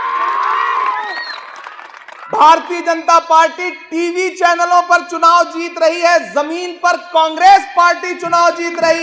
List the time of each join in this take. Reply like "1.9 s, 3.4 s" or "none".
none